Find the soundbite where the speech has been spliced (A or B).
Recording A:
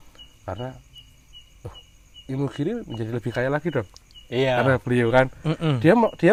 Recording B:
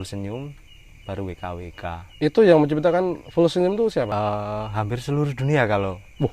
B